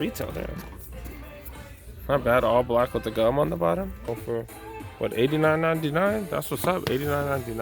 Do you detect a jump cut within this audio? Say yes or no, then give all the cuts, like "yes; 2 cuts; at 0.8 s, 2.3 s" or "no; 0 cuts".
yes; 1 cut; at 4.1 s